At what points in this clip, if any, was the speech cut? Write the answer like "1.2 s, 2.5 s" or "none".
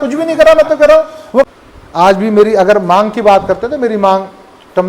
1.5 s